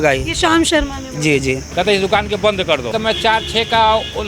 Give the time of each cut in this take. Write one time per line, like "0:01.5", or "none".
0:01.7
0:02.9